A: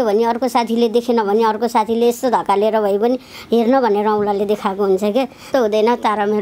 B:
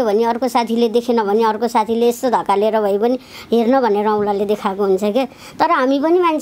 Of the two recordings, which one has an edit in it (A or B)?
A